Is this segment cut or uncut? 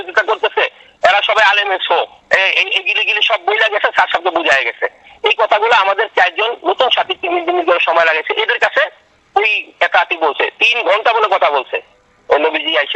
uncut